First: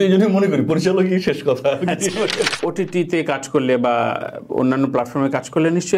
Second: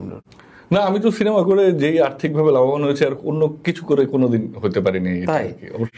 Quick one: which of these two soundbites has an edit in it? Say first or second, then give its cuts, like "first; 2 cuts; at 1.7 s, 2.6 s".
first; 1 cut; at 2.4 s